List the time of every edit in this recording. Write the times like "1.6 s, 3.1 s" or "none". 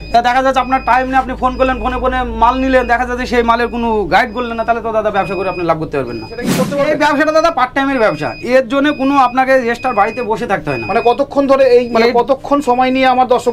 6.6 s